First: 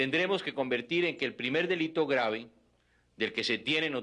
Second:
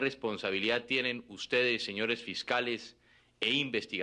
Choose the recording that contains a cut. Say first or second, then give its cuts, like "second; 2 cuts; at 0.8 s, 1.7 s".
first; 1 cut; at 2.6 s